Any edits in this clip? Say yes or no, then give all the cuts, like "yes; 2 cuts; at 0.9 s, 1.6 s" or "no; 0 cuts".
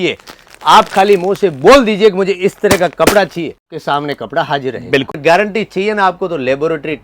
yes; 2 cuts; at 3.8 s, 5.2 s